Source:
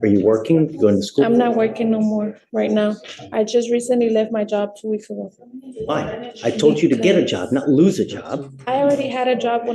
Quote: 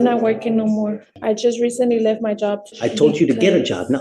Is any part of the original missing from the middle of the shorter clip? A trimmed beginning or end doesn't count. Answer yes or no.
yes